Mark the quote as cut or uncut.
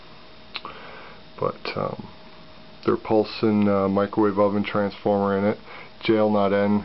cut